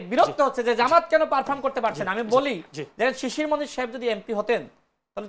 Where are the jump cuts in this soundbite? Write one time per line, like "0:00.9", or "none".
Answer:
none